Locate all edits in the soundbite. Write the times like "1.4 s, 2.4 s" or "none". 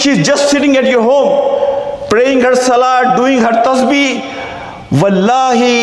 none